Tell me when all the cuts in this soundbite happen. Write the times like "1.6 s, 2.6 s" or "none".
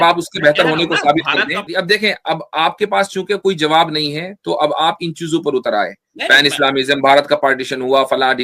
1.7 s